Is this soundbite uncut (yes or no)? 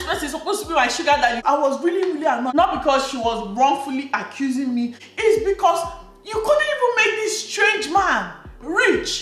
no